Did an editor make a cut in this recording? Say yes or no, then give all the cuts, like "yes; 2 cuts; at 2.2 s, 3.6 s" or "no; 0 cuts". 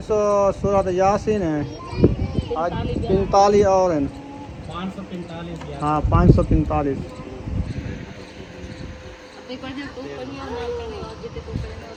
no; 0 cuts